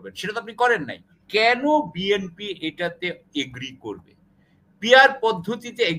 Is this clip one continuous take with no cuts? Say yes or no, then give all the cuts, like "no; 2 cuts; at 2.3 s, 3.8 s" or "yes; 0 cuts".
no; 1 cut; at 1.1 s